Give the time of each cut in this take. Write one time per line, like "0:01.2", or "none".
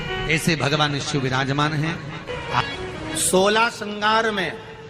0:02.6